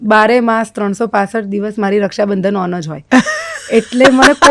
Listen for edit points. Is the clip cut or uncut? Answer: uncut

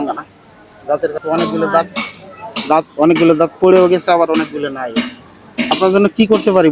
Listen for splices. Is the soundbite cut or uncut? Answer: cut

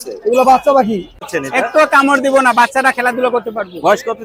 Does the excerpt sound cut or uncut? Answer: cut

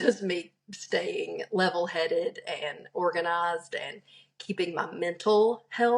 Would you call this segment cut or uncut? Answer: uncut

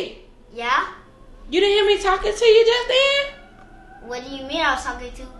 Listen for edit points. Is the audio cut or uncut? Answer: uncut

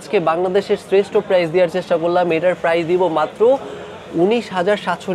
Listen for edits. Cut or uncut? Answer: uncut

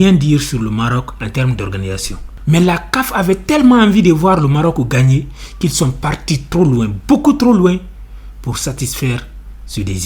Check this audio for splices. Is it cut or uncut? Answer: uncut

